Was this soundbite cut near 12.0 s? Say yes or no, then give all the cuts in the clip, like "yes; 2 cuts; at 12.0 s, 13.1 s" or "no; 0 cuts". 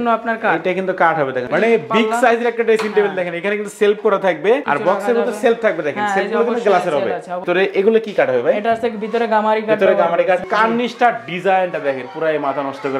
no; 4 cuts; at 1.5 s, 4.6 s, 7.4 s, 10.4 s